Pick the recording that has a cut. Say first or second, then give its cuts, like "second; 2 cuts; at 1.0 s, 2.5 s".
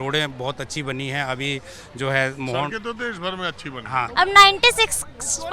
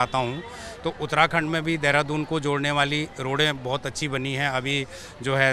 first; 1 cut; at 4.1 s